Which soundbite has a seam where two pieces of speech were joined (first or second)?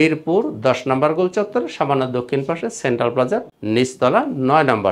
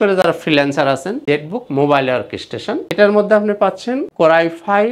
second